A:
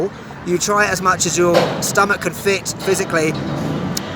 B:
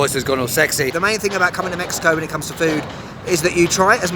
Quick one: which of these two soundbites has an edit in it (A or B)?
B